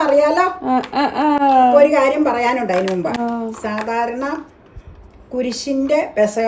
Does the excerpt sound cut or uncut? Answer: uncut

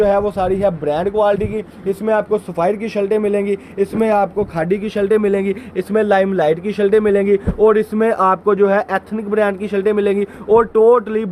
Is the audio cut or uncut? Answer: uncut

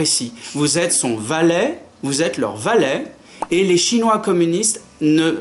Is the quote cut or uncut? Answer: uncut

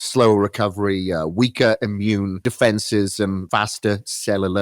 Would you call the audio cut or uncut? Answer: cut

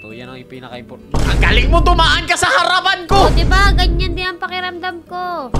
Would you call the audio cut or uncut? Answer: uncut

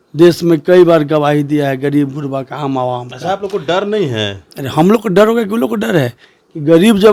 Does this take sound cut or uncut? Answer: uncut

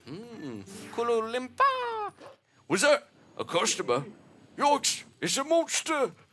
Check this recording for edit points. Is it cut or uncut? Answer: cut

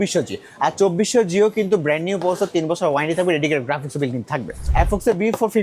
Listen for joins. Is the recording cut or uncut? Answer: cut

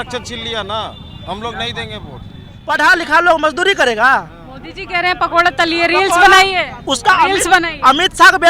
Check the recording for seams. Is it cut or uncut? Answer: cut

